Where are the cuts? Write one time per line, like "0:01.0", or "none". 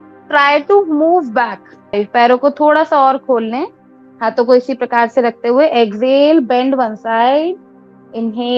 0:01.9